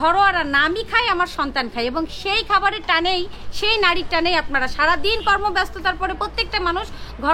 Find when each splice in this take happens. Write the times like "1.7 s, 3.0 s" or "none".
none